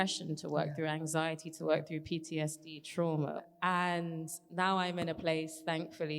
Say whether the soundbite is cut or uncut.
cut